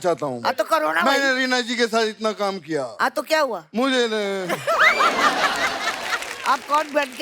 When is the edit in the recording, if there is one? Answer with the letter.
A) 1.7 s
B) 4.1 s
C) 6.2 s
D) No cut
C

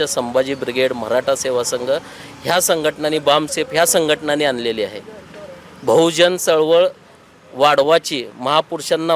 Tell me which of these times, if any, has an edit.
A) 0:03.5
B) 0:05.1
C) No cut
C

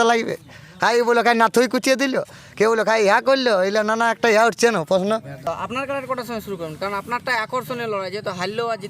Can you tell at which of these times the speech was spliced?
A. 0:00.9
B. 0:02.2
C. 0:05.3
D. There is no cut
C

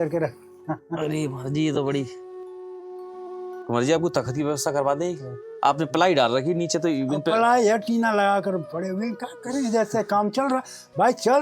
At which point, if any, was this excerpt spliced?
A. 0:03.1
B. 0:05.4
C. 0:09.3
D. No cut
B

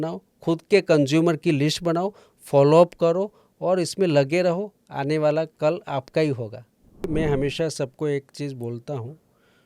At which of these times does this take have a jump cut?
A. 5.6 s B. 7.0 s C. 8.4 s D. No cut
B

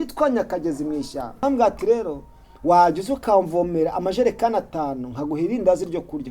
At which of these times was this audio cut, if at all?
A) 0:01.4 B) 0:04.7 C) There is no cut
A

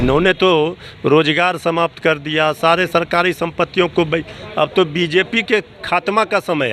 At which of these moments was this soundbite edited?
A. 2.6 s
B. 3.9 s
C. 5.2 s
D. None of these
D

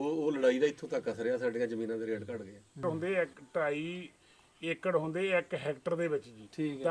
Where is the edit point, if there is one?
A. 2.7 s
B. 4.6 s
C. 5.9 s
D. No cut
A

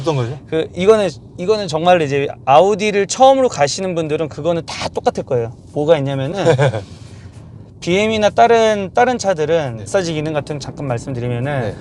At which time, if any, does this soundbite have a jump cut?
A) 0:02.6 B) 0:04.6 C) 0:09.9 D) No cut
C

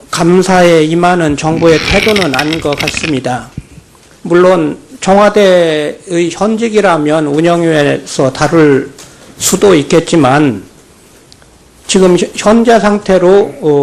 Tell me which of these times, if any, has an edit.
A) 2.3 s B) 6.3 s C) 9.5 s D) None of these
C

